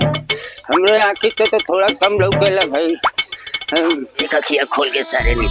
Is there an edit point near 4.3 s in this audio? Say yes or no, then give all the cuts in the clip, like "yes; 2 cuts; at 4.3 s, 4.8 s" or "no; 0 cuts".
yes; 1 cut; at 4.3 s